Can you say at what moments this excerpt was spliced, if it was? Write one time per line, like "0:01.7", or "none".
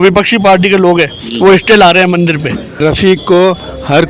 0:02.6